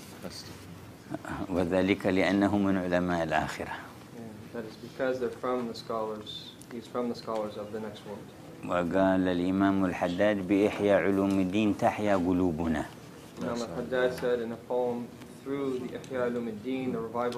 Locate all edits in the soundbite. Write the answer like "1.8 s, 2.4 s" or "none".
12.3 s